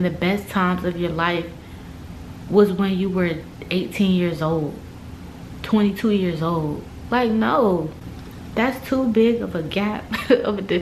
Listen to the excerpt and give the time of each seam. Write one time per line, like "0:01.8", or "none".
none